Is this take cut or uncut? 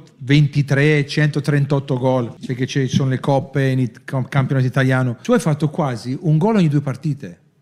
cut